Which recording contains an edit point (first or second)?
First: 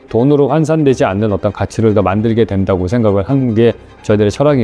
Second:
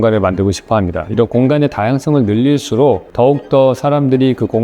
second